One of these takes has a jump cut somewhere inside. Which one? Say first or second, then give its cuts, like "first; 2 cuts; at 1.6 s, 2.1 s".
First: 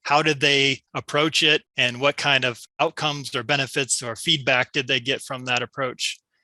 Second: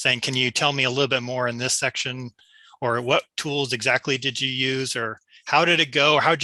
first; 3 cuts; at 0.9 s, 1.7 s, 2.6 s